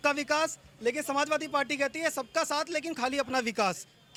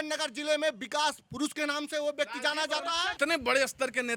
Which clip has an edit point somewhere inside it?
second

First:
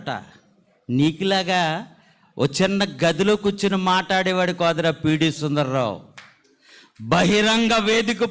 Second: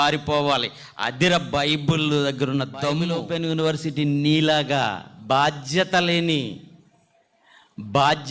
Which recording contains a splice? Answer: second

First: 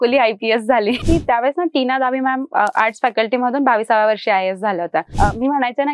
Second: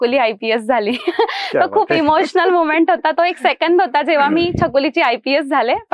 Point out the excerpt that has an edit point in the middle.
first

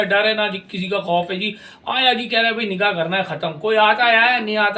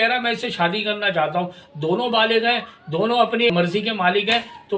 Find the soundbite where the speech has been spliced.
second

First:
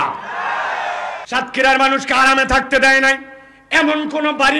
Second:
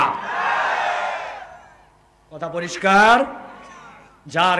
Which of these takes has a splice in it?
first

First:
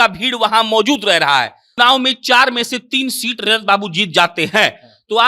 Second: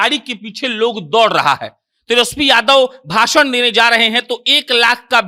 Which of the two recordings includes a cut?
first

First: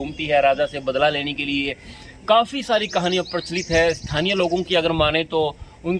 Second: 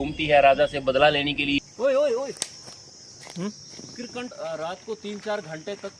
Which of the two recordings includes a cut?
second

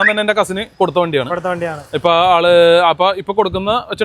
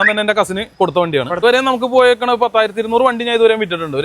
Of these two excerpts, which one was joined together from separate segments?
second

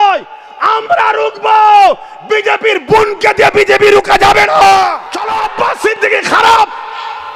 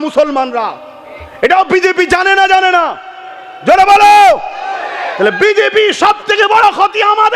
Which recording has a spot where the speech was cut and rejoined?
first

